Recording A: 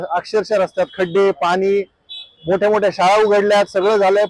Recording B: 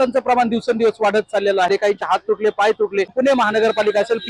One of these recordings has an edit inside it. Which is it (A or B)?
B